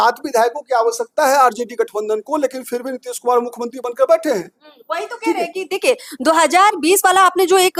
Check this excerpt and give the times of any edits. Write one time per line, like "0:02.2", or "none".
none